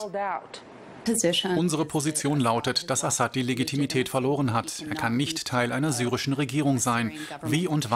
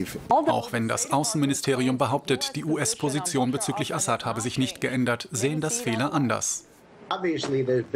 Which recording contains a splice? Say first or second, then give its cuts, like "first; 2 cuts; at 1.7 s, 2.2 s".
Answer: first; 1 cut; at 4.8 s